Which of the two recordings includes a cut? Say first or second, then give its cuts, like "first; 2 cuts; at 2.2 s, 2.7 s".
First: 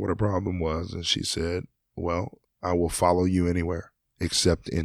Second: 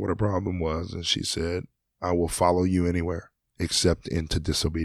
second; 1 cut; at 1.8 s